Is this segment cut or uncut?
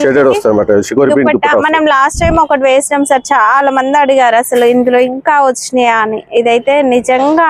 uncut